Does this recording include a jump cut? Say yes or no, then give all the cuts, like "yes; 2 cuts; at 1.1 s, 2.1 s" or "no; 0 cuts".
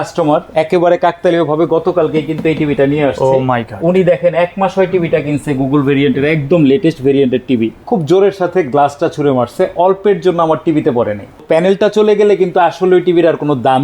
yes; 2 cuts; at 7.8 s, 11.4 s